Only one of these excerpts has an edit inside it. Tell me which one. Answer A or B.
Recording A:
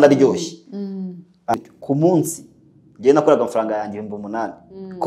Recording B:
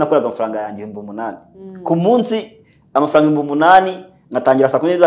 A